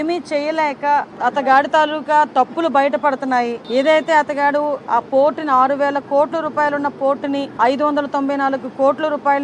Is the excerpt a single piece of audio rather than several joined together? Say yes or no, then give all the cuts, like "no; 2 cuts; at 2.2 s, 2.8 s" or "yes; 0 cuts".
no; 3 cuts; at 1.1 s, 3.6 s, 7.5 s